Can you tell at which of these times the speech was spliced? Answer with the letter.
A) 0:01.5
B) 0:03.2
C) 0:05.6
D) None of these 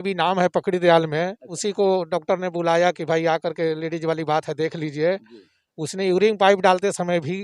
A